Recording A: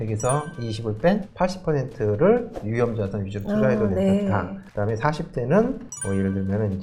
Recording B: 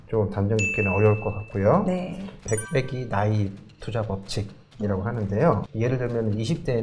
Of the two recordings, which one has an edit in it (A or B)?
B